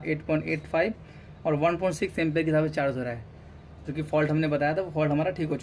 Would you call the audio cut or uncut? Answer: uncut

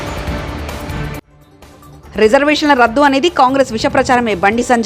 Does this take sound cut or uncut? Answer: uncut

